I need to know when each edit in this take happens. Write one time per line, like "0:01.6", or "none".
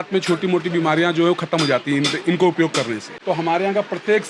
0:03.1